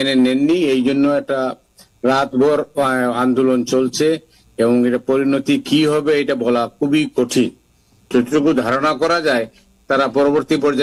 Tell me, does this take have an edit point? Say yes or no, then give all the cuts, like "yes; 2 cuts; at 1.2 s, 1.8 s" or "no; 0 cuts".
yes; 1 cut; at 7.8 s